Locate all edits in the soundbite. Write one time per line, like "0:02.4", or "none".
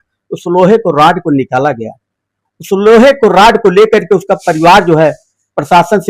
none